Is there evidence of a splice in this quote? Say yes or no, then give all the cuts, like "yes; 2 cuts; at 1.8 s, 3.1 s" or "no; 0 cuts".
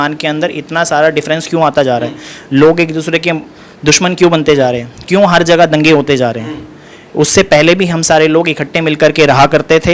no; 0 cuts